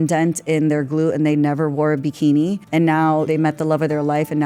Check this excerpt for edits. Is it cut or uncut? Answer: cut